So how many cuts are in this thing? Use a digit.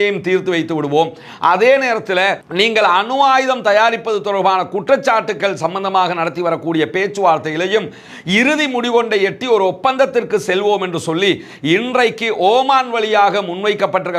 0